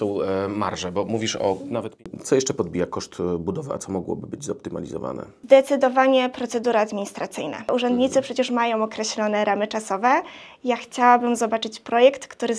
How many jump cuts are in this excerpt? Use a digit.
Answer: 2